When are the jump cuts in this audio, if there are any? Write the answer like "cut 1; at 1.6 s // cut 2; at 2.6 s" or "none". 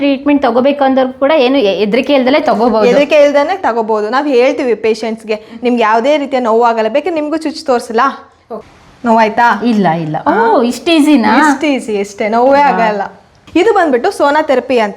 cut 1; at 8.5 s // cut 2; at 13.3 s